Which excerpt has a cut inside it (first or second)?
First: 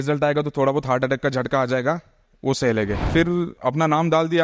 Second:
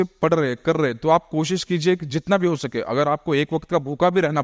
first